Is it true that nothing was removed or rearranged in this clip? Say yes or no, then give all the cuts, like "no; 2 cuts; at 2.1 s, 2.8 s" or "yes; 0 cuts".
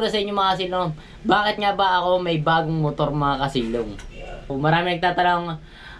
no; 1 cut; at 4.5 s